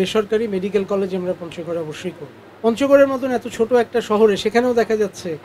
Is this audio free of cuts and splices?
no; 1 cut; at 2.4 s

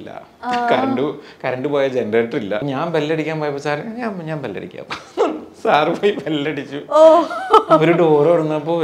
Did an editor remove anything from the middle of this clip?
yes; 1 cut; at 2.6 s

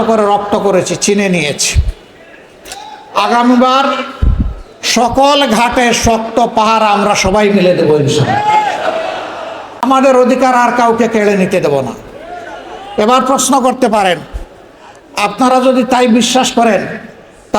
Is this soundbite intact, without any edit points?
no; 1 cut; at 9.8 s

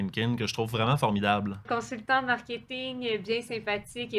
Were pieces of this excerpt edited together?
yes; 1 cut; at 1.6 s

